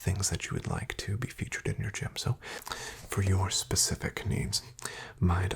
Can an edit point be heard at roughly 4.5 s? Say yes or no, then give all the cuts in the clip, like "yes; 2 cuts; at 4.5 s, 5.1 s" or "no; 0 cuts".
no; 1 cut; at 2.5 s